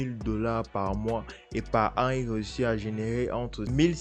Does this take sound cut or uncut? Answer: uncut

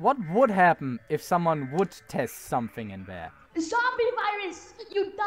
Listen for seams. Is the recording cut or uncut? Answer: cut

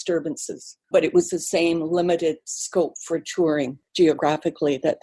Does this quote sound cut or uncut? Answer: cut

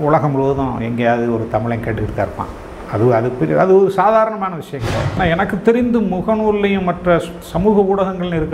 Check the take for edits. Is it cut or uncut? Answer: cut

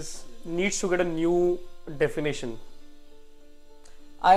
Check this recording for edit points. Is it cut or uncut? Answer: uncut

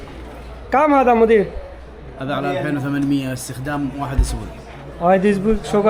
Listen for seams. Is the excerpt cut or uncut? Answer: uncut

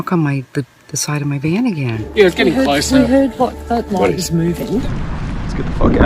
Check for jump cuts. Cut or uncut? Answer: cut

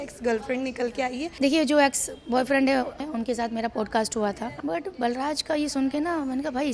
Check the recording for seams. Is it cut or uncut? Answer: cut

